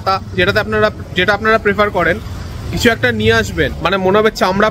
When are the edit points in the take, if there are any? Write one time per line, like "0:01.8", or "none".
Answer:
0:03.8